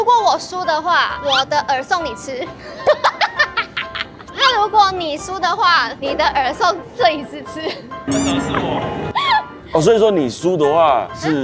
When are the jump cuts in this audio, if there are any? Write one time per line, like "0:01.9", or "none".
0:04.1
0:08.0
0:09.5